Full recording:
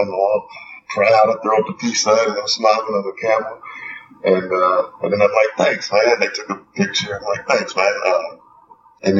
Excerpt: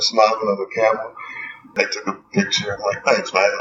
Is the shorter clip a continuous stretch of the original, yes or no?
no